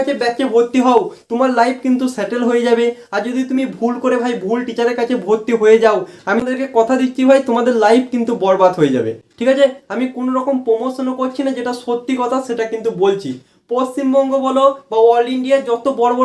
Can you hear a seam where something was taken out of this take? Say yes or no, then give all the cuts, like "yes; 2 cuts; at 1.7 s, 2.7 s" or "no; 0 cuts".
no; 0 cuts